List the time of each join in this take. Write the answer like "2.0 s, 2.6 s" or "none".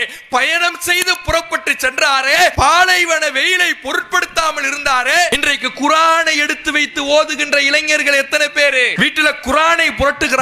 2.5 s, 5.3 s, 8.9 s